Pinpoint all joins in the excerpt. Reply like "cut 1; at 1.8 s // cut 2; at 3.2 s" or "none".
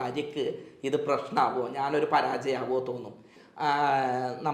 cut 1; at 3.3 s